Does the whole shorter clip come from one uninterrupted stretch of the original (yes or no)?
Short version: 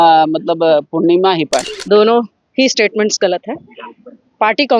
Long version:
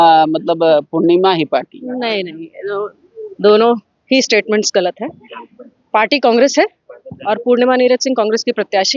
no